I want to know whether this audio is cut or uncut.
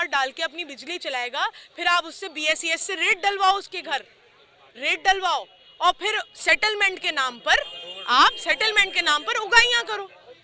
uncut